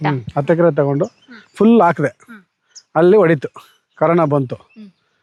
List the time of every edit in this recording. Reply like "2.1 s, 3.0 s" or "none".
none

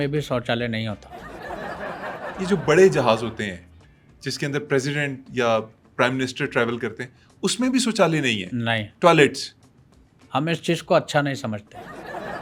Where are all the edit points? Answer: none

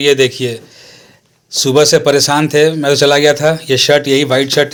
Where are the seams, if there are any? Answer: none

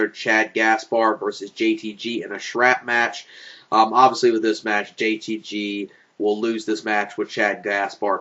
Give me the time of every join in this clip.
none

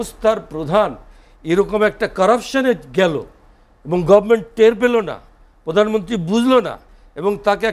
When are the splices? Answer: none

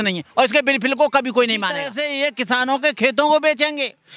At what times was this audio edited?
2.0 s

